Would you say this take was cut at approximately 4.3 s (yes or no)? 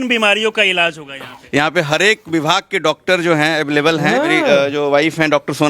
yes